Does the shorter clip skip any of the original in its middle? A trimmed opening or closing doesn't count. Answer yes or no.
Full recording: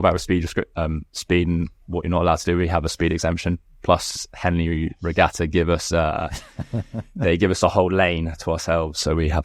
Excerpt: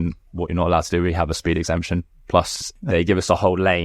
yes